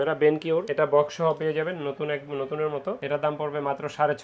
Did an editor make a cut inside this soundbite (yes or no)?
no